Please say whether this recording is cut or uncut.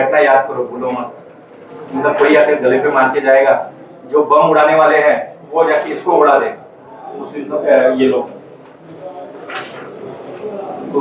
uncut